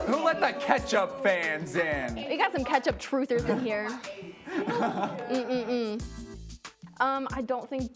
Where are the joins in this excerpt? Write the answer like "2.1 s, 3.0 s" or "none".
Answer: 6.2 s